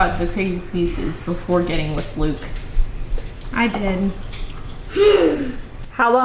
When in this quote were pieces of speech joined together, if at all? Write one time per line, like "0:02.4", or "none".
none